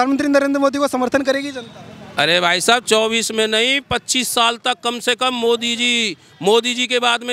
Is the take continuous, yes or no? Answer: yes